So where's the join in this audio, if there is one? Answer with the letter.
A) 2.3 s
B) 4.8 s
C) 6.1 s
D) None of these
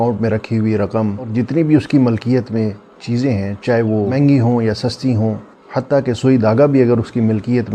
D